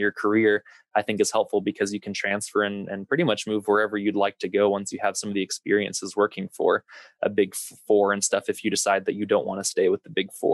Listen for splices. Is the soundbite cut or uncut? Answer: uncut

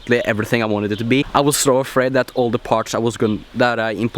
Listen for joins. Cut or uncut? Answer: cut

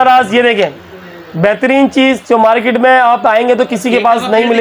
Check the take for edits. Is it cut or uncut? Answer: uncut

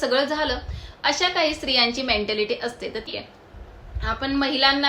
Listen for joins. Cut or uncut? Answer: cut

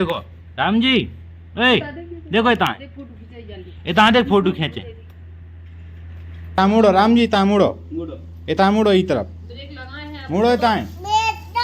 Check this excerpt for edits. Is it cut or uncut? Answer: cut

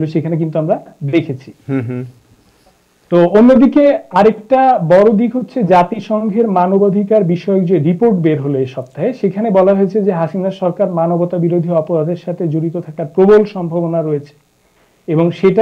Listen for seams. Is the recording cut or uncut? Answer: uncut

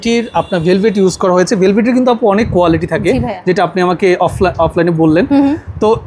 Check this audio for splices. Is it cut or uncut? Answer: uncut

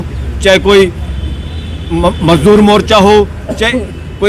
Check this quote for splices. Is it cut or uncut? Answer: uncut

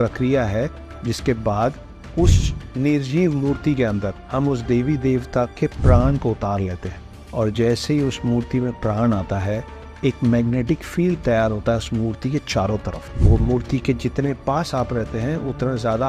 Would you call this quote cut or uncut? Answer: uncut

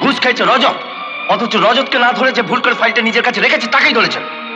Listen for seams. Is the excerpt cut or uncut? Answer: uncut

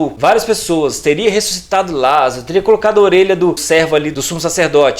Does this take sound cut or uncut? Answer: cut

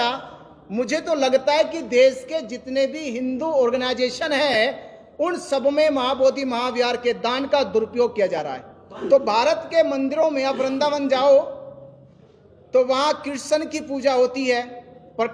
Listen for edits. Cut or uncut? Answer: cut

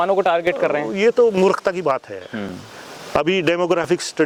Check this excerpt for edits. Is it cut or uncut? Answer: uncut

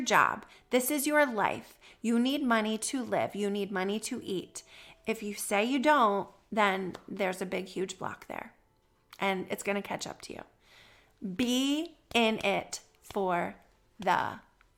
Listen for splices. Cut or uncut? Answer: uncut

